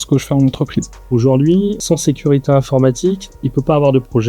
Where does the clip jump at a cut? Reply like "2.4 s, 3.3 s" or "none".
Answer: 1.0 s, 3.3 s